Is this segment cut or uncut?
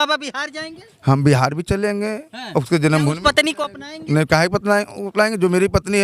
uncut